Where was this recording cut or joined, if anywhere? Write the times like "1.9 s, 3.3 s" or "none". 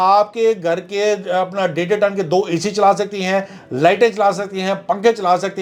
none